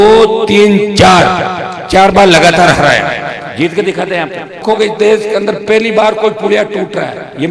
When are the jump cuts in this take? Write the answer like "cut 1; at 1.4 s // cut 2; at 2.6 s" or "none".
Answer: cut 1; at 4.6 s